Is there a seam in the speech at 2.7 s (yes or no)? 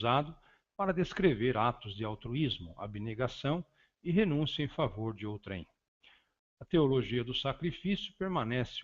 yes